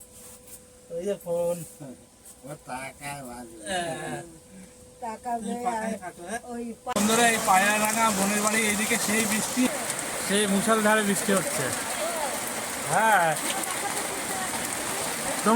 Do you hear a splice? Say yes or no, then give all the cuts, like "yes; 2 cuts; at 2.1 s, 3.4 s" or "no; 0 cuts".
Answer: yes; 2 cuts; at 6.9 s, 9.7 s